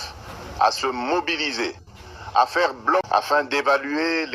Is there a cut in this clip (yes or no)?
yes